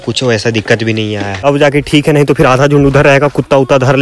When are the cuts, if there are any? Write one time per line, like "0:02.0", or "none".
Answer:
0:01.4